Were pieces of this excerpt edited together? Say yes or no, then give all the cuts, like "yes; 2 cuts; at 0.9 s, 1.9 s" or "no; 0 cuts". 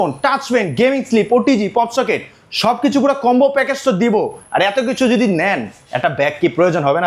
no; 0 cuts